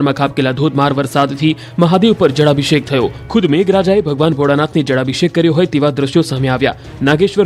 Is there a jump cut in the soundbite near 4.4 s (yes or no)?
no